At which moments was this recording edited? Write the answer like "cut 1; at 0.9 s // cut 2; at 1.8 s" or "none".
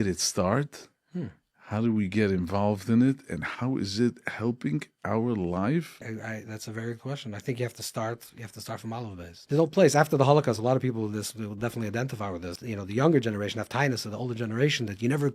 cut 1; at 6.1 s // cut 2; at 9.4 s // cut 3; at 12.6 s